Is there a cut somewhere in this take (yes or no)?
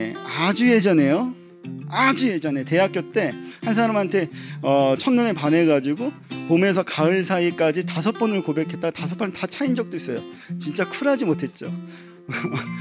no